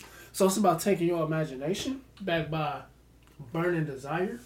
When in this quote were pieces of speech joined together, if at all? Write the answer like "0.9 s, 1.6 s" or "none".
2.1 s